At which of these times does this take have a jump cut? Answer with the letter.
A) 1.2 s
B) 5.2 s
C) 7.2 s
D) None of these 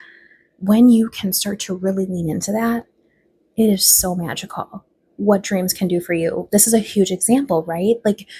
D